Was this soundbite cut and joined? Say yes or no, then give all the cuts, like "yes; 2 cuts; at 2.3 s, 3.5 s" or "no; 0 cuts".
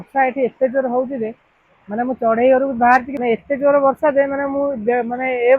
yes; 1 cut; at 3.1 s